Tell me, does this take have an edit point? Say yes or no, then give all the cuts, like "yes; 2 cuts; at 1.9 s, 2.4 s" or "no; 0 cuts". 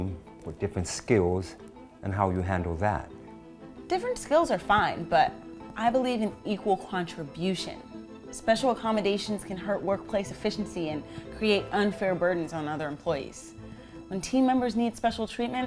no; 0 cuts